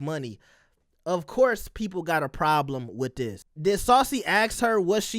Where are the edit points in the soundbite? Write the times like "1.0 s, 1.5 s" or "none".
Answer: 3.4 s